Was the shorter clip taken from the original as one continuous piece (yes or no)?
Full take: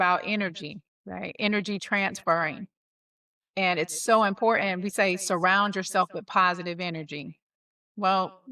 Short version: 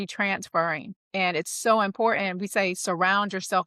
no